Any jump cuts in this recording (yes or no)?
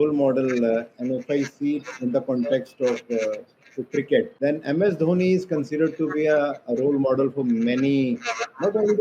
yes